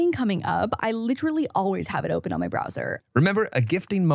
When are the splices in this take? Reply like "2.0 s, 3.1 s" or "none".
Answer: 2.9 s